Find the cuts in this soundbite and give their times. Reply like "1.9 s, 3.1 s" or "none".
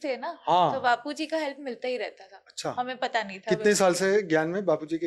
none